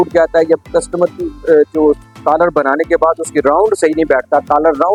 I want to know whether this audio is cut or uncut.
uncut